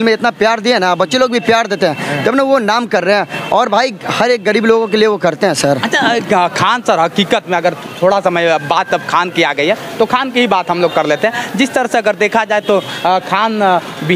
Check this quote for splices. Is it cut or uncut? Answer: uncut